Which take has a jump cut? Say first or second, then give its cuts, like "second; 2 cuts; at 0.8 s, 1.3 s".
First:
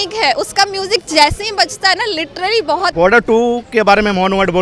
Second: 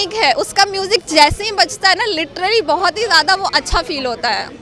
first; 1 cut; at 2.9 s